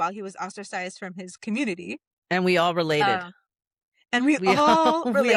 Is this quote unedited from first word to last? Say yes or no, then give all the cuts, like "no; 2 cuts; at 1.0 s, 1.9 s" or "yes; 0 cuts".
yes; 0 cuts